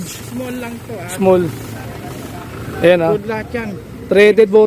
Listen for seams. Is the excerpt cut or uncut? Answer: uncut